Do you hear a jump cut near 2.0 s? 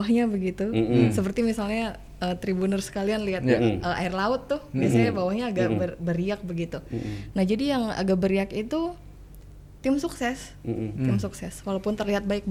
no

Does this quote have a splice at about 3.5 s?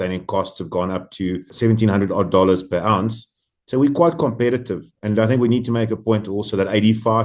no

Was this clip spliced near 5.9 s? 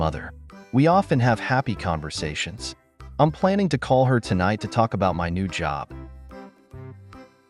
yes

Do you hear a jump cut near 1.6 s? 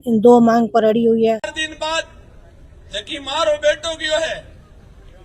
yes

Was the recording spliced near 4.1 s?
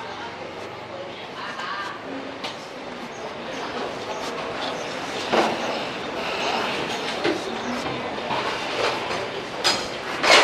no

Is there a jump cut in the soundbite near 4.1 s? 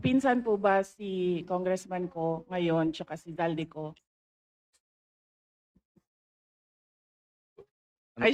no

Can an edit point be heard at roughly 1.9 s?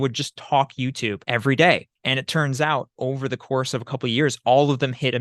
yes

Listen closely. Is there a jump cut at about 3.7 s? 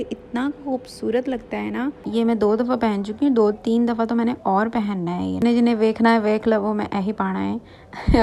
no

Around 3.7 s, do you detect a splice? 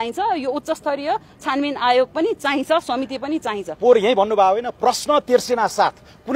yes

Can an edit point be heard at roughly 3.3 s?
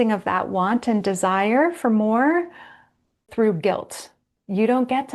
yes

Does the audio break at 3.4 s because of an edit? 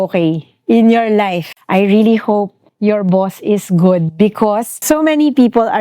no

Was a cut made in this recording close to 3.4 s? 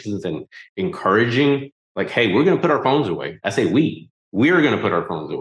no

